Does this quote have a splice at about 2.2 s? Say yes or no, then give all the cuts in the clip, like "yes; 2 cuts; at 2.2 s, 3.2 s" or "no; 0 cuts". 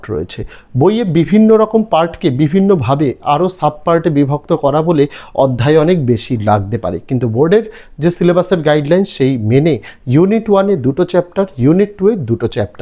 no; 0 cuts